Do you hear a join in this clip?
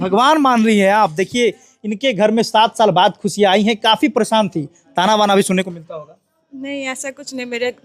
no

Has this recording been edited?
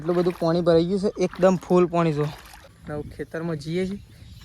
yes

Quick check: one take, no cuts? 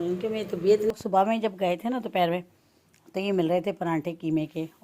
no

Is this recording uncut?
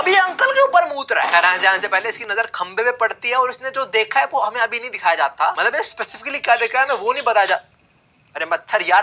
yes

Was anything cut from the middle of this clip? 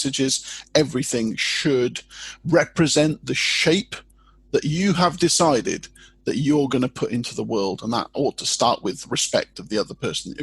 yes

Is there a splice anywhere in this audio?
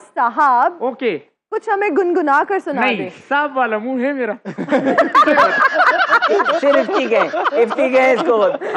no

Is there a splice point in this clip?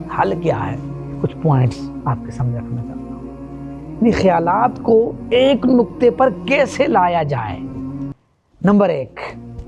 no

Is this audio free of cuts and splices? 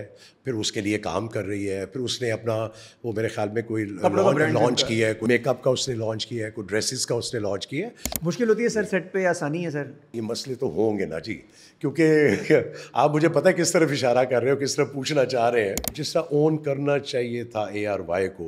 no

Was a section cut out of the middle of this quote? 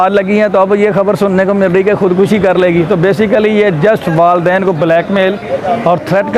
no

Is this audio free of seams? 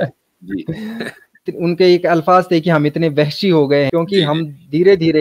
no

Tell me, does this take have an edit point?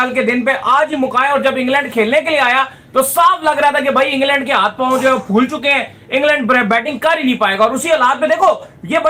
no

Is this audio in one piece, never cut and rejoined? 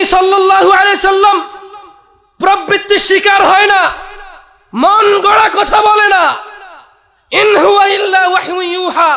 yes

